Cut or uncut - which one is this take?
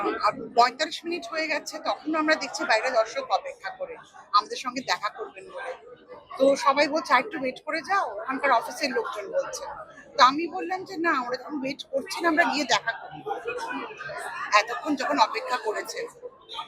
uncut